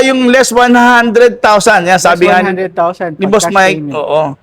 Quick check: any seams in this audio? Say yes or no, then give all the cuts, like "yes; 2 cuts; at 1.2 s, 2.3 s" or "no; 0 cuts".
no; 0 cuts